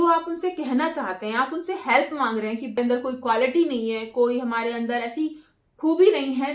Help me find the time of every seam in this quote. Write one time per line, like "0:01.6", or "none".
0:02.8